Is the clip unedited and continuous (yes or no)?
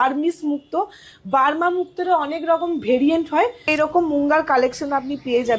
no